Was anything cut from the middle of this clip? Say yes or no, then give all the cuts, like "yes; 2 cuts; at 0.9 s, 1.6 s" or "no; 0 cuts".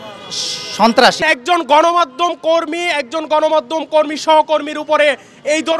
yes; 1 cut; at 1.2 s